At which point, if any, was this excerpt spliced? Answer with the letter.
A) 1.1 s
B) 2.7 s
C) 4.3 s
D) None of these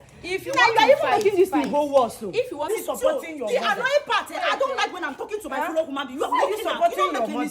B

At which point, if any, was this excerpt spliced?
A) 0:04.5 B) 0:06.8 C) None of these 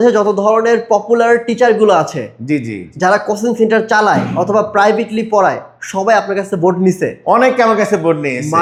C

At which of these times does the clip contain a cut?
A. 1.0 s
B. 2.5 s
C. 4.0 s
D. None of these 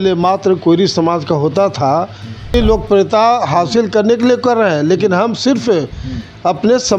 B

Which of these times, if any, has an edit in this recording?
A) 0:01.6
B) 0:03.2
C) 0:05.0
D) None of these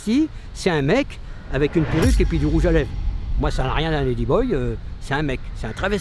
D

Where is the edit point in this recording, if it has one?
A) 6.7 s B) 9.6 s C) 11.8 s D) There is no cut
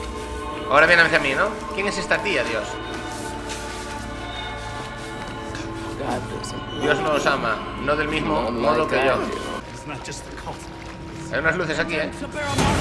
B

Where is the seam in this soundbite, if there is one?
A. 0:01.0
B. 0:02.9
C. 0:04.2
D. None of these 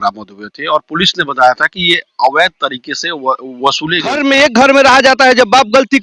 C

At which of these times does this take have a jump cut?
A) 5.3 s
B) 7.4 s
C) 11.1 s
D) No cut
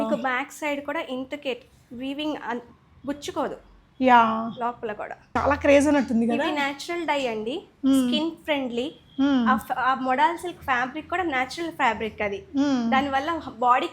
A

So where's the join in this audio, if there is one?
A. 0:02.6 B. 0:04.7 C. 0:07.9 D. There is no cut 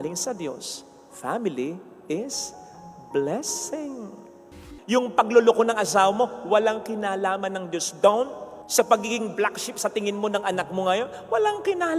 B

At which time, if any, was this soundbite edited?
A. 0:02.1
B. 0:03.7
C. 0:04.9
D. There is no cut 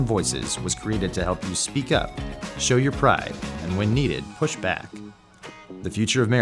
C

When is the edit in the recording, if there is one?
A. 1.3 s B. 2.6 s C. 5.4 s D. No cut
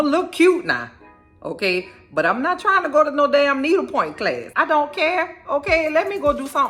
D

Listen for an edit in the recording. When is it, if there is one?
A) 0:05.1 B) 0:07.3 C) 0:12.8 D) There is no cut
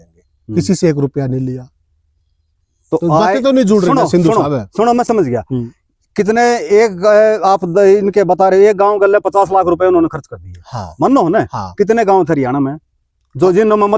D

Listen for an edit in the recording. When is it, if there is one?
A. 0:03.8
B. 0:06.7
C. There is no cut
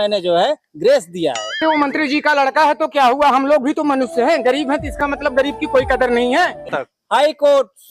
B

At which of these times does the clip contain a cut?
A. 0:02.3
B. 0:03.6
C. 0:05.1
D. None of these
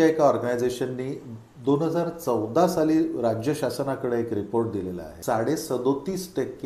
C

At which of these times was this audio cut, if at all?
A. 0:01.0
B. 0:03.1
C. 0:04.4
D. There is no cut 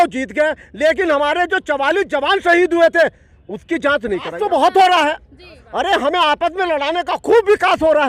C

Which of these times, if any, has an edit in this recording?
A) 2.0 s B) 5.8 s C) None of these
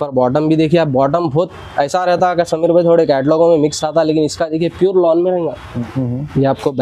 B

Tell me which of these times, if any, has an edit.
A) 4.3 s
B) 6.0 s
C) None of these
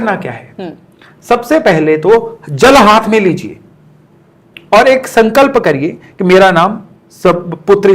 C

